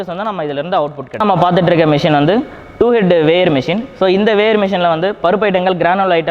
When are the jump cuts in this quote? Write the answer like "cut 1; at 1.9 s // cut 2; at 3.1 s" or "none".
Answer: cut 1; at 1.2 s